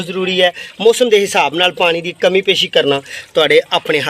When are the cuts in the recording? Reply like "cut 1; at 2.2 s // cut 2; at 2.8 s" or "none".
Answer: none